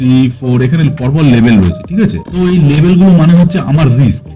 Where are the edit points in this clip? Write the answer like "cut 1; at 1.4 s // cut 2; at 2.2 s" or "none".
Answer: none